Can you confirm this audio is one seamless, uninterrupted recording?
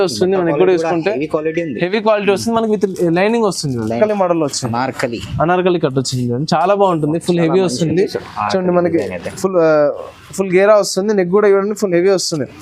no; 1 cut; at 4.0 s

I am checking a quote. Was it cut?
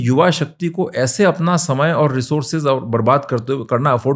no; 0 cuts

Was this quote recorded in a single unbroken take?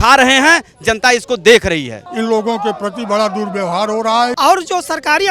no; 2 cuts; at 2.0 s, 4.3 s

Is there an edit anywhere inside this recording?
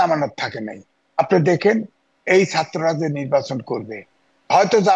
no; 0 cuts

